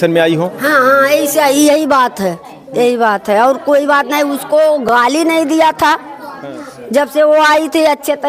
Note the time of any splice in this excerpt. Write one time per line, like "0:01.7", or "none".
none